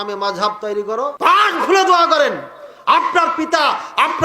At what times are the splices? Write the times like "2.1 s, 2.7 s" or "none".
1.1 s

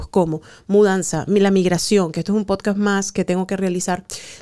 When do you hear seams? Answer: none

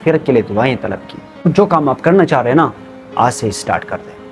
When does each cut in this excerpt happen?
1.4 s

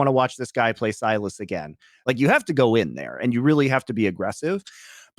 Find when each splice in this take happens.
1.9 s

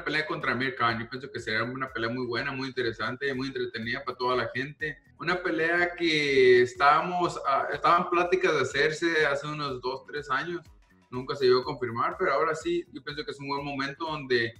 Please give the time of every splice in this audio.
none

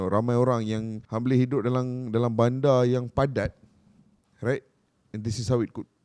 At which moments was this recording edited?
1.0 s

